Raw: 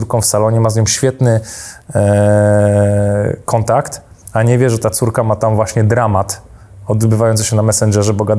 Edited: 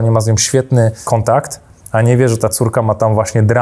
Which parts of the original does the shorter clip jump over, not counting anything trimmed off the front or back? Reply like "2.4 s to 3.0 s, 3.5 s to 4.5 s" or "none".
1.5 s to 3.4 s